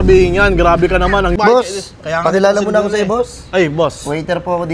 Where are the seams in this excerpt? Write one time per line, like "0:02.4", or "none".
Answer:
0:01.3